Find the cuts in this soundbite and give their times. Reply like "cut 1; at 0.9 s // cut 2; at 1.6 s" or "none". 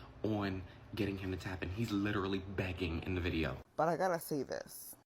cut 1; at 3.6 s